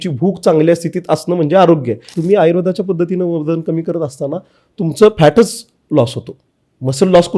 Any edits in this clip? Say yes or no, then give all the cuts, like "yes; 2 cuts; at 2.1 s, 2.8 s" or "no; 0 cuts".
yes; 1 cut; at 2.1 s